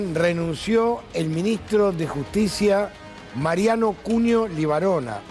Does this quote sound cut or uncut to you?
uncut